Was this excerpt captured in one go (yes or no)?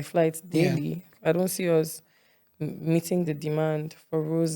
no